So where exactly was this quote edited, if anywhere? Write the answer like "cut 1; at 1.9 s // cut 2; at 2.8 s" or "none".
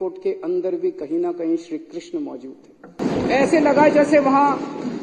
cut 1; at 3.0 s